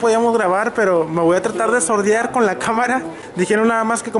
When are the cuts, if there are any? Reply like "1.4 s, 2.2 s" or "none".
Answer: none